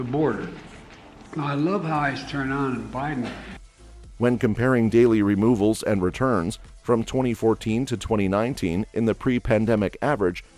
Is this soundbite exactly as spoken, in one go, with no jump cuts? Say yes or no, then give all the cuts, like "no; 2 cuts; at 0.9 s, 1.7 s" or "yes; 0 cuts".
yes; 0 cuts